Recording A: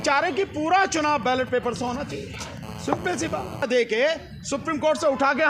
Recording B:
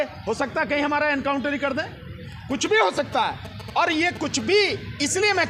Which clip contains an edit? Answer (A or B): A